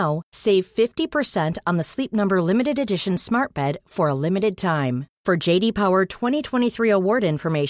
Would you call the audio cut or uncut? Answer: uncut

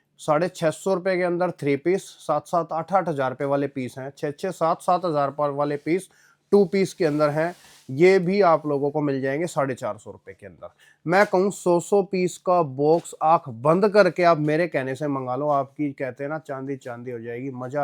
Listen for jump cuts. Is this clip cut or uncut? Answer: uncut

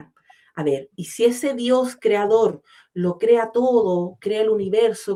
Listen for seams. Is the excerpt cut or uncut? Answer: uncut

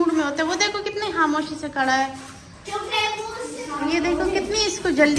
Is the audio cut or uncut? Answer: cut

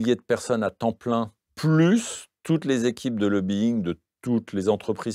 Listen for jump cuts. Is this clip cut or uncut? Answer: cut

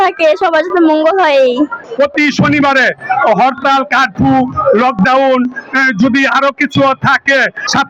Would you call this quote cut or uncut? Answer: cut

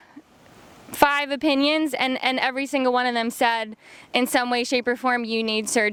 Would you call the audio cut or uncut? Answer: uncut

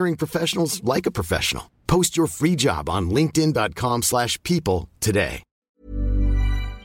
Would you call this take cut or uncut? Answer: cut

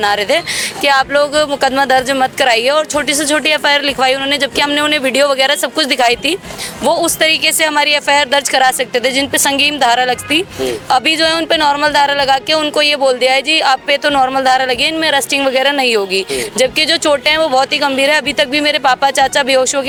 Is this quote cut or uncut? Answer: uncut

